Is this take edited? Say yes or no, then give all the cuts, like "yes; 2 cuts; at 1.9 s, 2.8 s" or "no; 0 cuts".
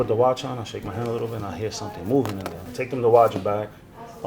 yes; 1 cut; at 2.5 s